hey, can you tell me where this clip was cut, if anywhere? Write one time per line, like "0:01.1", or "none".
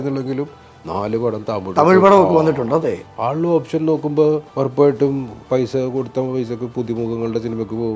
0:03.1
0:04.5
0:05.3